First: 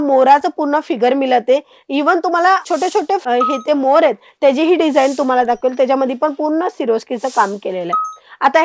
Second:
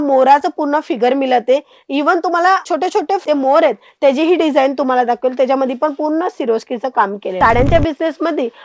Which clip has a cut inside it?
second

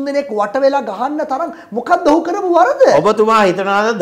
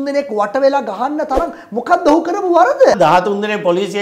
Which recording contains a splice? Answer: second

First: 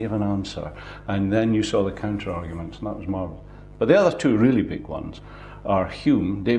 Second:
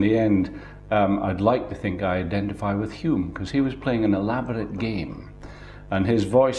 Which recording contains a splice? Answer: first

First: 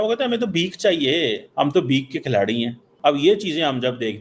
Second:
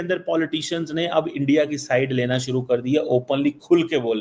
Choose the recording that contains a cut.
first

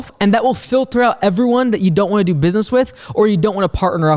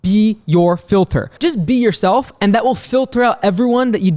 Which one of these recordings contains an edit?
second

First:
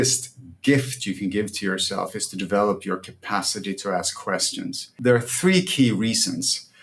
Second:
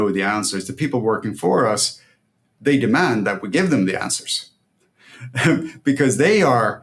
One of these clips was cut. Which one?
first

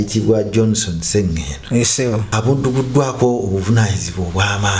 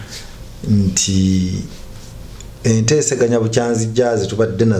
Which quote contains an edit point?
first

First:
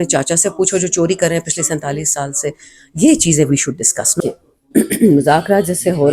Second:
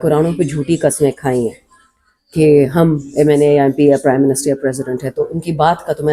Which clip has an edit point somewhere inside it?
first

